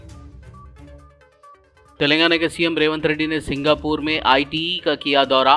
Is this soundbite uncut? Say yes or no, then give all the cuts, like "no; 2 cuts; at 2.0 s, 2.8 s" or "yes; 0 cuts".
yes; 0 cuts